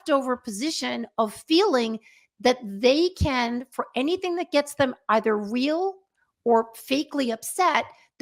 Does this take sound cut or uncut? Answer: uncut